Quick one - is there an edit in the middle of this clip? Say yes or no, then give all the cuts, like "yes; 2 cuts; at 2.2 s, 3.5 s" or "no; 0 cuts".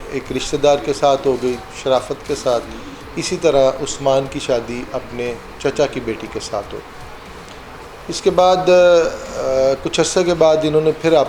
no; 0 cuts